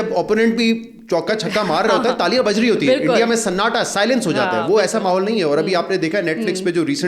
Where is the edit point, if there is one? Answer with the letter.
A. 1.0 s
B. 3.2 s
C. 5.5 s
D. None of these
D